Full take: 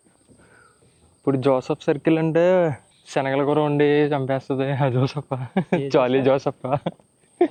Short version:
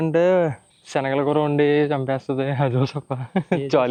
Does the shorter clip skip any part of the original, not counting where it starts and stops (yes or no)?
no